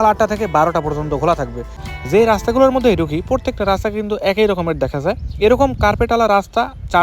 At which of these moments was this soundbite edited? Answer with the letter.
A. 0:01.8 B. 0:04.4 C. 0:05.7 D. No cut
A